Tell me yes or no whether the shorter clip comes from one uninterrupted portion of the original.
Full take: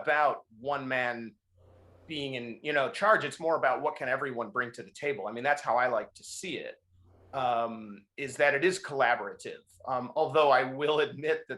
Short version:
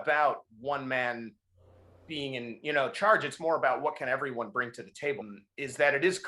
no